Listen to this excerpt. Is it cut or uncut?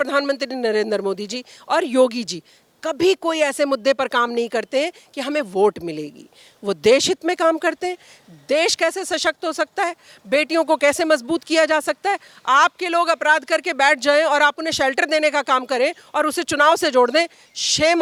uncut